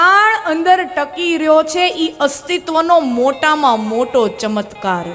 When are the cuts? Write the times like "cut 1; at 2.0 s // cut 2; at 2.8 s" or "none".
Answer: none